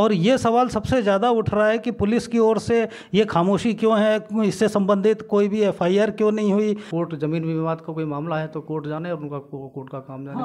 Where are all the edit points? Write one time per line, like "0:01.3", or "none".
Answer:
0:06.9